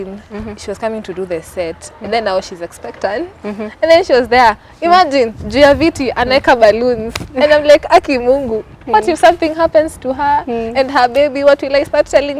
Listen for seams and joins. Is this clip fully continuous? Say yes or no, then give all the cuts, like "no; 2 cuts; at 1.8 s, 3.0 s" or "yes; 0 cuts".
yes; 0 cuts